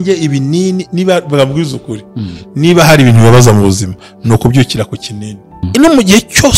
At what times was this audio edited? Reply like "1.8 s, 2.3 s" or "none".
5.7 s